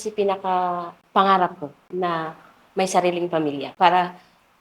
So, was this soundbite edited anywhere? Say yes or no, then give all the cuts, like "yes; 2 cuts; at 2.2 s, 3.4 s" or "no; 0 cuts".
yes; 3 cuts; at 1.0 s, 1.9 s, 3.6 s